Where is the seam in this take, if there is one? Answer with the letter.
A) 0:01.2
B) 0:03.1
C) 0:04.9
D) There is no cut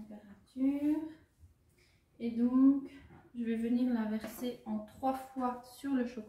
D